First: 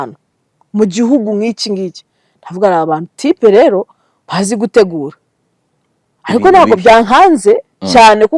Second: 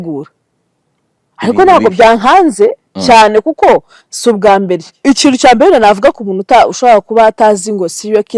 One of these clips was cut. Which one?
second; 1 cut; at 4.9 s

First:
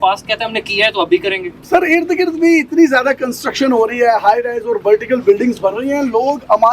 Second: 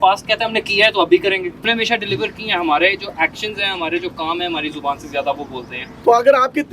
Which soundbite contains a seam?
second; 2 cuts; at 1.7 s, 5.8 s

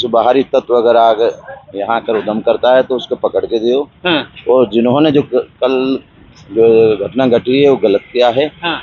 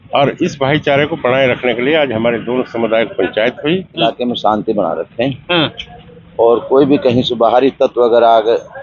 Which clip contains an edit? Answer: second; 1 cut; at 4.0 s

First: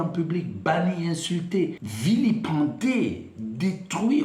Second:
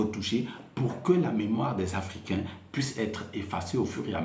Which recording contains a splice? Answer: first; 1 cut; at 1.9 s

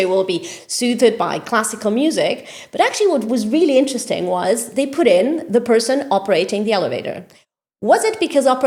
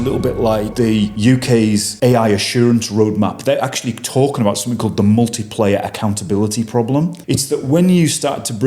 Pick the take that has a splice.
second; 3 cuts; at 1.0 s, 1.9 s, 7.2 s

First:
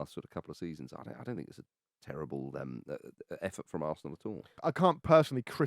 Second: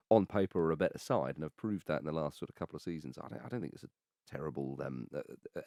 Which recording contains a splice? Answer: first; 1 cut; at 4.6 s

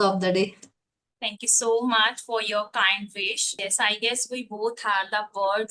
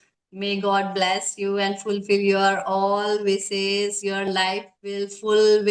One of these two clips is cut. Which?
first; 1 cut; at 3.5 s

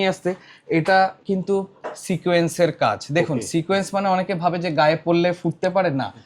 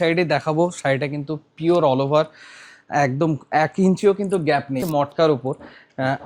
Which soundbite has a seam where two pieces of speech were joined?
second; 1 cut; at 4.8 s

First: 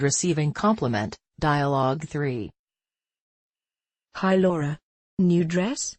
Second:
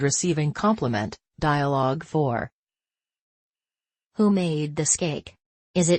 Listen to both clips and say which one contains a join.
second; 1 cut; at 2.0 s

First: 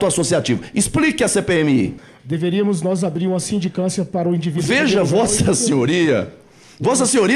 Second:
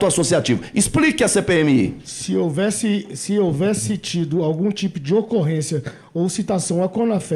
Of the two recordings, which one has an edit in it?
first; 1 cut; at 2.1 s

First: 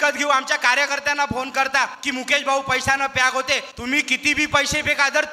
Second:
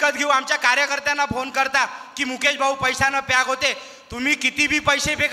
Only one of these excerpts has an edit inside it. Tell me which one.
first; 2 cuts; at 2.0 s, 3.7 s

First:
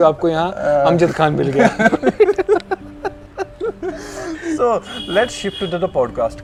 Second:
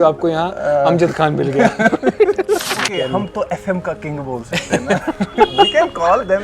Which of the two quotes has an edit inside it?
second; 1 cut; at 2.9 s

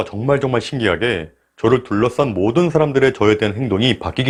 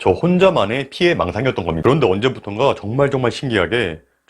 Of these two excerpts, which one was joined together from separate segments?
second; 1 cut; at 1.8 s

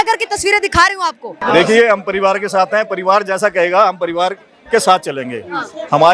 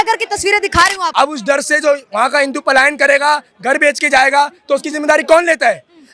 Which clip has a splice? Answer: second; 1 cut; at 1.0 s

